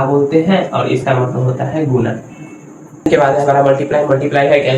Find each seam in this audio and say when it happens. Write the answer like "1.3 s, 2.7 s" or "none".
3.0 s